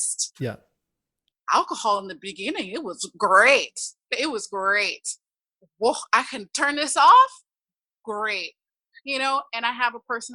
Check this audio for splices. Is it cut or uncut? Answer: cut